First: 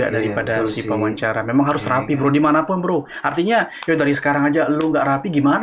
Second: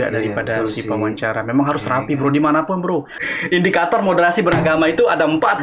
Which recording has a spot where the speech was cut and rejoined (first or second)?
second